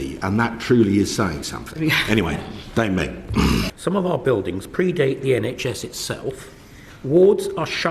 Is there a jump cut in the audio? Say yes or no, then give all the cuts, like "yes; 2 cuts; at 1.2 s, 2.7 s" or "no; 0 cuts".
yes; 1 cut; at 3.7 s